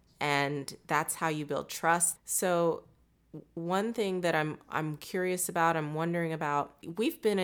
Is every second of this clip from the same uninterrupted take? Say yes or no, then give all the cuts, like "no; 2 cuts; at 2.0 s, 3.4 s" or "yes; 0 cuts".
no; 1 cut; at 2.1 s